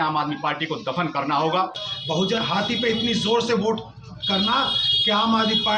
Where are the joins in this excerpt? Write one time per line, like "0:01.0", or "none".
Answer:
0:01.9